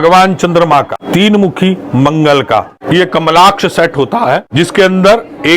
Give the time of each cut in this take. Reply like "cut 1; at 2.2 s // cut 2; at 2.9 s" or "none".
cut 1; at 1.0 s // cut 2; at 2.8 s // cut 3; at 4.5 s